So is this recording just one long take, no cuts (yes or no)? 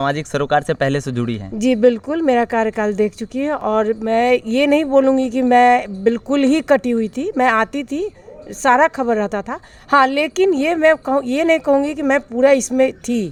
yes